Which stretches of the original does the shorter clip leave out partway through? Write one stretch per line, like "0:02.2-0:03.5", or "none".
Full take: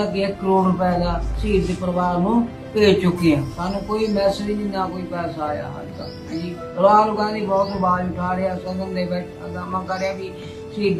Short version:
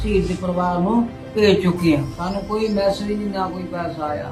none